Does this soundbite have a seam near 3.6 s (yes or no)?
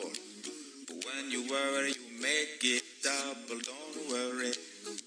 no